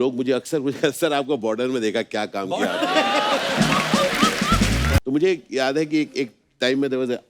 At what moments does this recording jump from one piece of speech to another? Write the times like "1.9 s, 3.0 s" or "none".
4.9 s